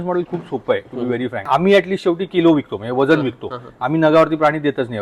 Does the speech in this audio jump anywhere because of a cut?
yes; 1 cut; at 1.5 s

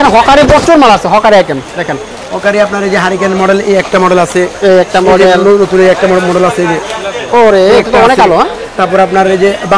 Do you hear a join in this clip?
no; 0 cuts

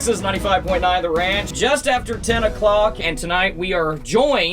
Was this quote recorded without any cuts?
no; 2 cuts; at 1.5 s, 3.0 s

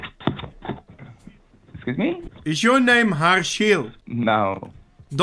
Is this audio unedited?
no; 2 cuts; at 2.3 s, 4.0 s

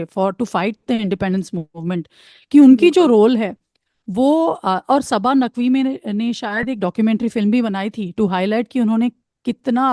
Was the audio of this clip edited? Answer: no; 0 cuts

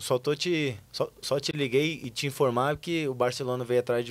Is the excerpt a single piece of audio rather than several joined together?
yes; 0 cuts

